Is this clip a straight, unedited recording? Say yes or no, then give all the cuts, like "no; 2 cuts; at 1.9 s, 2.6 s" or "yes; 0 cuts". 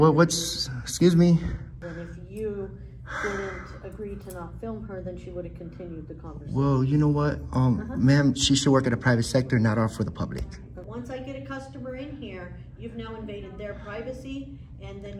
no; 2 cuts; at 1.8 s, 10.8 s